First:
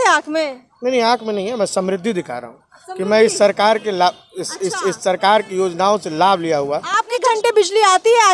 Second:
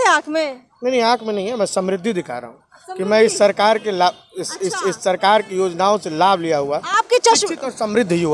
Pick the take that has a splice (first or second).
first